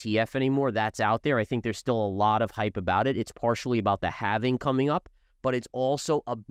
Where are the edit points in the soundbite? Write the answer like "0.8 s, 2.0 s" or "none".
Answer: none